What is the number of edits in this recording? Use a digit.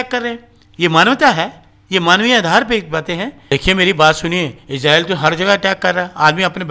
1